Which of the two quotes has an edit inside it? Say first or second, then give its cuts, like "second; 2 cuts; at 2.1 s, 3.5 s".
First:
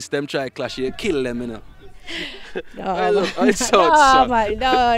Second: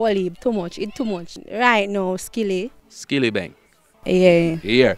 second; 1 cut; at 1.3 s